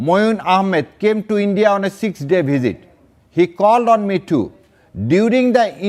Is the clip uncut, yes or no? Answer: yes